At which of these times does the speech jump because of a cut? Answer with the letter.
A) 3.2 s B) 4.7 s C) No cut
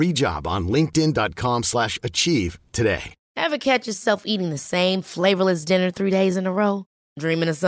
A